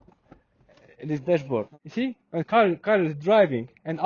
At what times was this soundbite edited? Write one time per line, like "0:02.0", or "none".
0:01.7